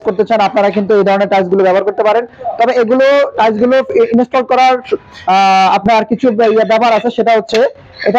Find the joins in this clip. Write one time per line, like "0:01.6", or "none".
none